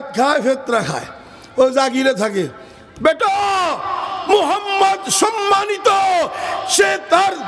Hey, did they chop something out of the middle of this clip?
no; 0 cuts

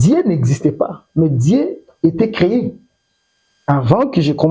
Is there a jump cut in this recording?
no; 0 cuts

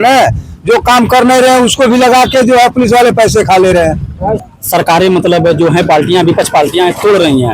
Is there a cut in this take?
yes; 1 cut; at 4.5 s

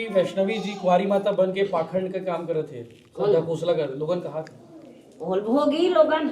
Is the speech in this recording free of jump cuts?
yes; 0 cuts

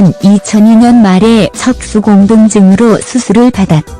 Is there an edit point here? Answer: yes; 1 cut; at 3.0 s

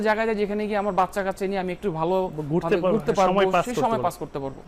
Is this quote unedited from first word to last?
yes; 0 cuts

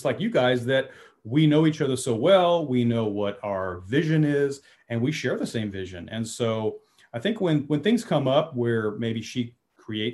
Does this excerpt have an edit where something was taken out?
no; 0 cuts

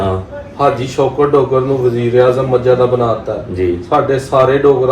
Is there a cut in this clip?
no; 0 cuts

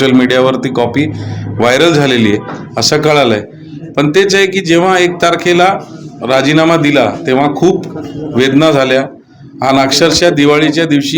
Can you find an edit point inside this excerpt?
no; 0 cuts

